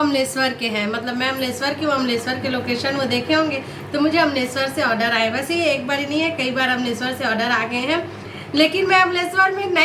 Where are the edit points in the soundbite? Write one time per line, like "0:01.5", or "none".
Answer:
none